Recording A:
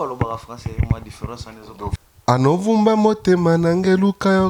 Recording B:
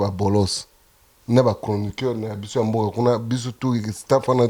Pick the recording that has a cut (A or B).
A